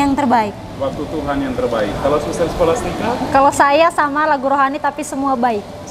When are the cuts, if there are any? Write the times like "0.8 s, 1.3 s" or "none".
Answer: none

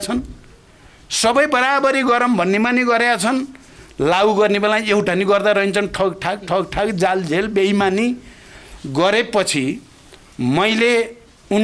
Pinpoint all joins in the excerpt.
none

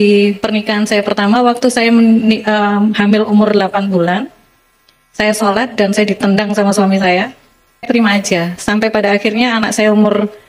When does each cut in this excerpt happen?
7.8 s

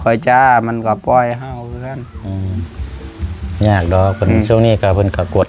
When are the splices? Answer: none

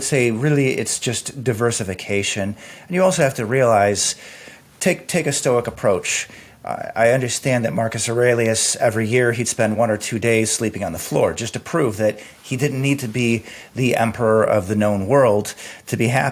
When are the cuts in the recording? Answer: none

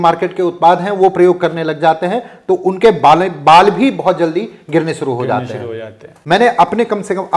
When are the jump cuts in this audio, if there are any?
6.1 s

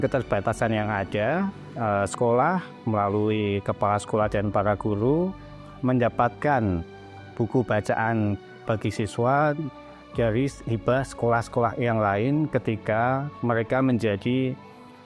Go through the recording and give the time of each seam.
8.5 s

